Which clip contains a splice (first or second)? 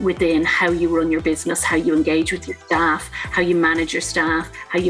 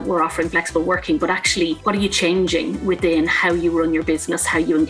second